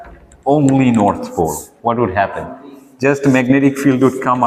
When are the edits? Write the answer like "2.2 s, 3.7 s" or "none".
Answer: none